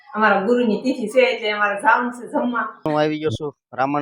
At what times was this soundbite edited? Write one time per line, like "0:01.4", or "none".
0:02.8